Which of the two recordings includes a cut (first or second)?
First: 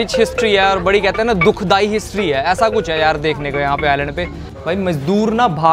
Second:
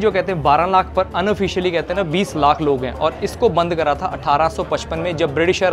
first